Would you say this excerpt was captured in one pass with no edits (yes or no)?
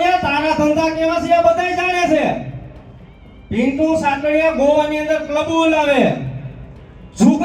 yes